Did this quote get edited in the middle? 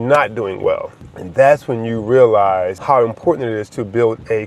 yes; 1 cut; at 2.8 s

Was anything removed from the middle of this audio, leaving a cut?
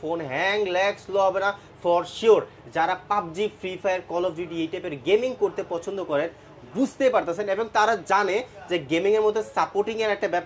no; 0 cuts

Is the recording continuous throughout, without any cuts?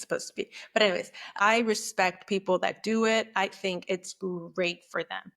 no; 1 cut; at 1.2 s

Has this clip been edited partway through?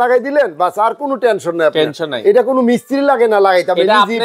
no; 0 cuts

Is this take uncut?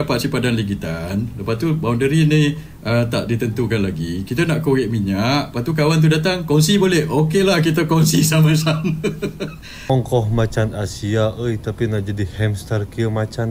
no; 1 cut; at 9.9 s

